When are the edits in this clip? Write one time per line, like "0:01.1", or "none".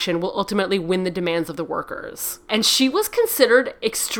0:02.5

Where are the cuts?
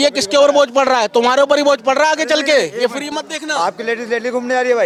none

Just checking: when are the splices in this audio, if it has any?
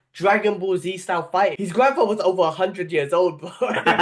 0:01.6

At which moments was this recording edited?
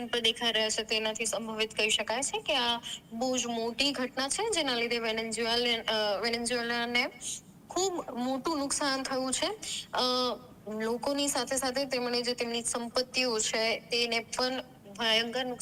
none

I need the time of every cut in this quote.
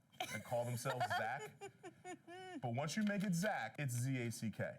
0:03.7

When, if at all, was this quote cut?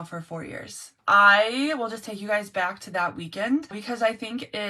0:01.0
0:03.8

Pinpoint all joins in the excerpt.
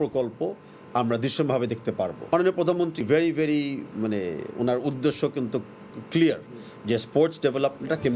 0:02.3
0:03.0

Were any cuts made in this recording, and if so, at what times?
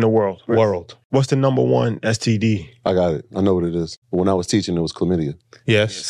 0:01.0
0:04.0

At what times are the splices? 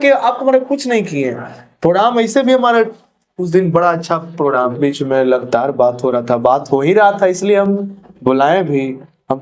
0:04.8

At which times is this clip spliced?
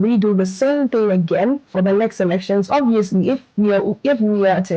none

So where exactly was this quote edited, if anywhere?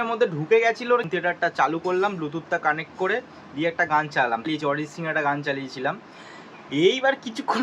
0:00.9
0:04.4

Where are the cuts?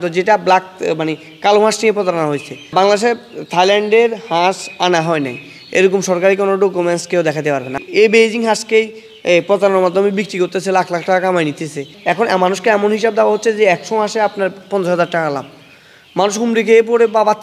0:02.7
0:07.8
0:11.9

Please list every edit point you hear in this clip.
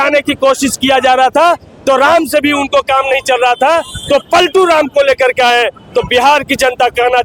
none

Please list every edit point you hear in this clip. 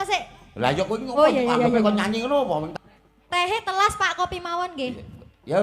0:02.7

